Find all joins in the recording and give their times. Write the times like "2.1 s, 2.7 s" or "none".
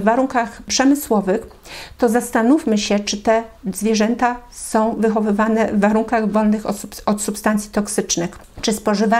none